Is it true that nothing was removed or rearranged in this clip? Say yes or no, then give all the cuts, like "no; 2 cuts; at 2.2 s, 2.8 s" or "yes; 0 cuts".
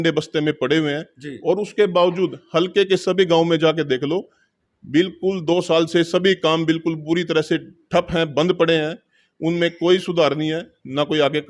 yes; 0 cuts